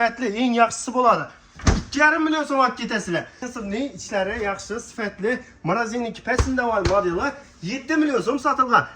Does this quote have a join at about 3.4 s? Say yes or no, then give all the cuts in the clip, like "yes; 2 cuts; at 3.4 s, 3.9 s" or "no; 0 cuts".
yes; 1 cut; at 3.4 s